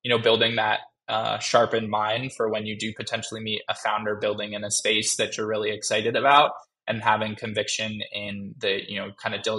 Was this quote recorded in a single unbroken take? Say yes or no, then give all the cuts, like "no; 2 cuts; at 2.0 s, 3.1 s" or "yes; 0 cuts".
yes; 0 cuts